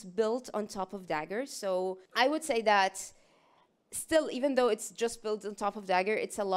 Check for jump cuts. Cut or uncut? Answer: cut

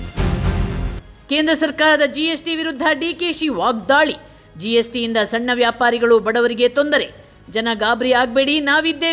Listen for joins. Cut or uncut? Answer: cut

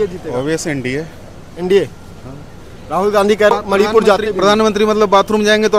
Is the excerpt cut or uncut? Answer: cut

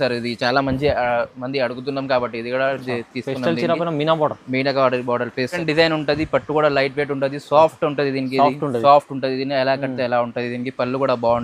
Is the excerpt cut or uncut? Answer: cut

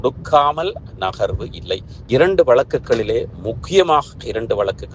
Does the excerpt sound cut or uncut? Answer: cut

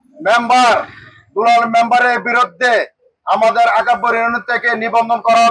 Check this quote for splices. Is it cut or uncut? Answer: uncut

